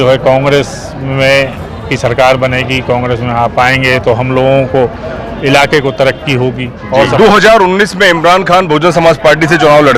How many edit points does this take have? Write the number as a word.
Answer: one